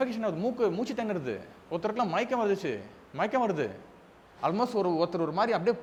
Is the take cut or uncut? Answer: uncut